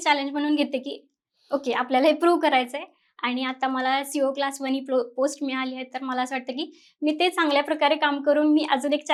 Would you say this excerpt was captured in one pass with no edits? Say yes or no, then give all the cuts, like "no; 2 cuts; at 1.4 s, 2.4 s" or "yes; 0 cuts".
yes; 0 cuts